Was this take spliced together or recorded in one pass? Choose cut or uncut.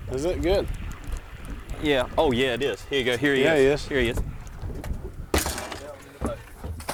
uncut